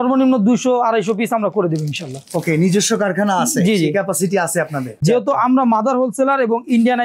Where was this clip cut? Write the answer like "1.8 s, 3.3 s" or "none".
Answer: 5.0 s